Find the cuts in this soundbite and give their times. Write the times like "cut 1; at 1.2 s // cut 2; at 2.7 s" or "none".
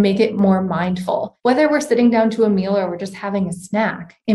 cut 1; at 1.3 s